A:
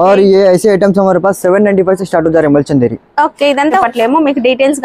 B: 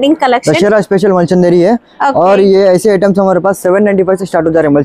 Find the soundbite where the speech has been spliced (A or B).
A